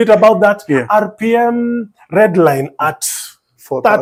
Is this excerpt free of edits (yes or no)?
yes